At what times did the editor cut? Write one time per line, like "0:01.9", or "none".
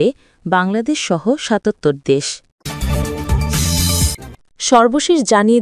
0:02.5
0:04.2